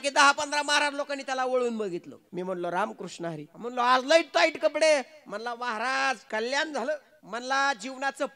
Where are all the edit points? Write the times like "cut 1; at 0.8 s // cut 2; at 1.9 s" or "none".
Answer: cut 1; at 2.2 s // cut 2; at 3.5 s // cut 3; at 6.2 s // cut 4; at 7.1 s